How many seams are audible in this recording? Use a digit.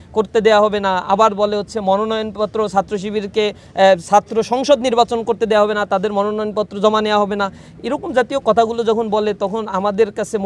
0